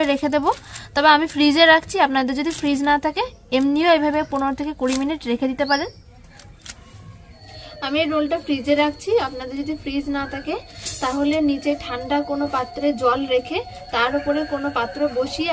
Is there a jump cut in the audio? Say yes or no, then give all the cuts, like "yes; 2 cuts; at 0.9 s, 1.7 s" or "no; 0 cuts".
no; 0 cuts